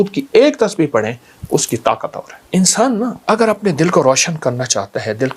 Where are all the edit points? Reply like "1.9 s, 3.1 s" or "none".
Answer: 2.3 s, 3.2 s